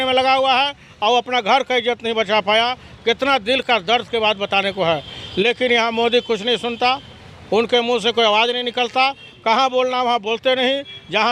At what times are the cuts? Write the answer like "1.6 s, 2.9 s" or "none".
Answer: none